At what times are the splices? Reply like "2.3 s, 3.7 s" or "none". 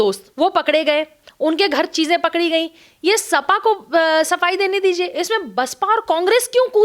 none